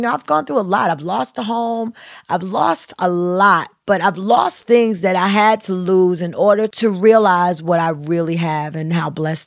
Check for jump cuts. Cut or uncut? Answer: cut